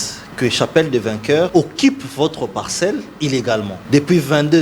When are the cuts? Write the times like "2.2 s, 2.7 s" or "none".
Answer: 1.5 s, 3.8 s